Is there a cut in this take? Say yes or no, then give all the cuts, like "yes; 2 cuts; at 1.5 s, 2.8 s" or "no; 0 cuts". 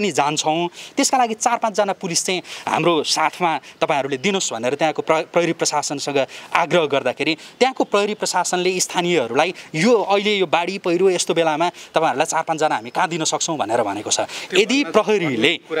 no; 0 cuts